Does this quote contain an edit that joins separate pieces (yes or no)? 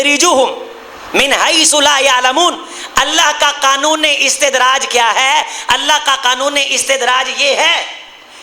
no